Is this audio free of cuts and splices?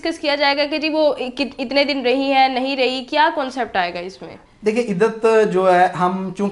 yes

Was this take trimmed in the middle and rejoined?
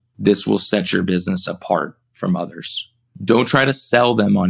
no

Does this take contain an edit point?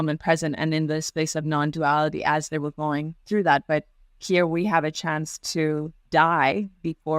yes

